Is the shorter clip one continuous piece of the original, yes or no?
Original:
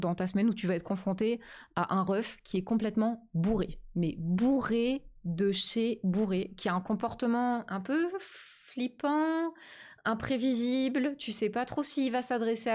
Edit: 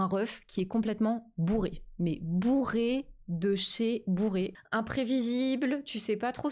no